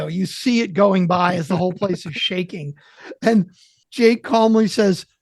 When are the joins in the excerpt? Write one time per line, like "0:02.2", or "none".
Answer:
0:03.8